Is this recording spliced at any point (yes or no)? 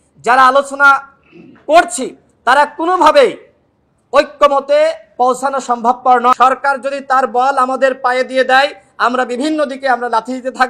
yes